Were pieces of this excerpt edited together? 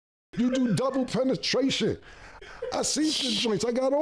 no; 0 cuts

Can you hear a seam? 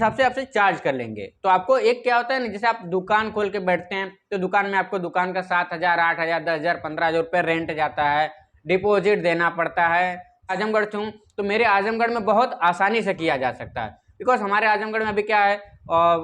yes; 1 cut; at 10.6 s

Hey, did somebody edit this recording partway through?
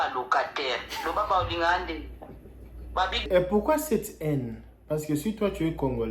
yes; 1 cut; at 3.3 s

